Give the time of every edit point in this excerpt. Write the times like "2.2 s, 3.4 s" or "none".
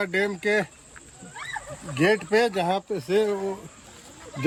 none